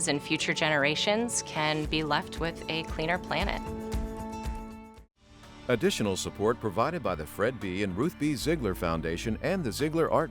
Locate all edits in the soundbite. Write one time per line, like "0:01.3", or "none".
0:05.5